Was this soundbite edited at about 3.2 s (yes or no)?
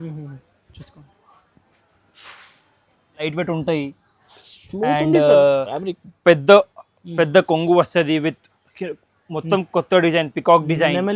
yes